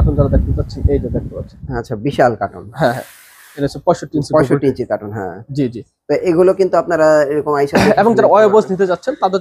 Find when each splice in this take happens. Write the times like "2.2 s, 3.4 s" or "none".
none

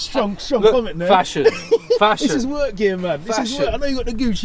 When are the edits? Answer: none

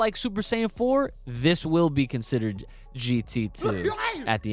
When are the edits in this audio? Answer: none

